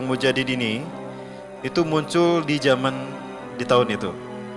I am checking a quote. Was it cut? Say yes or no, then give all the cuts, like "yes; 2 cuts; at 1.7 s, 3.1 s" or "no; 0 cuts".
no; 0 cuts